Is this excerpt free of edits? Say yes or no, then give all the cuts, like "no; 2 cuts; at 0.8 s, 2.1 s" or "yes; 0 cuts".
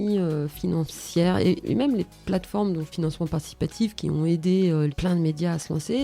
no; 3 cuts; at 1.6 s, 2.9 s, 4.9 s